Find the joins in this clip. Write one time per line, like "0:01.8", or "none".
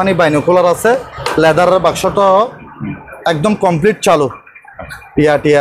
none